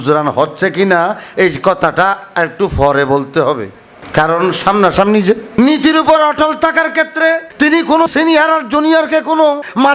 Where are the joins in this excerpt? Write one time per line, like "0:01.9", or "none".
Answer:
0:05.5